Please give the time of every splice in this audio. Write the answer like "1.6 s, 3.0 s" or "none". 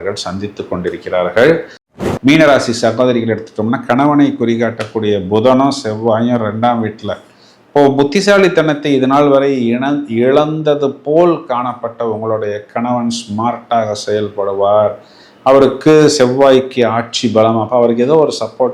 2.0 s